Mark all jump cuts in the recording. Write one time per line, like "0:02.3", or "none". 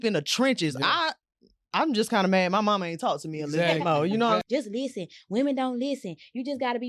0:04.4